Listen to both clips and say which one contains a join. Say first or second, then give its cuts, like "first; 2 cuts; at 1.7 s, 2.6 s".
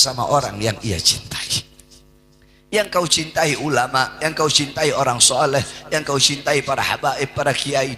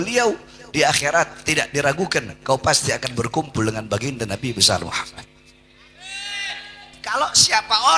second; 1 cut; at 6.9 s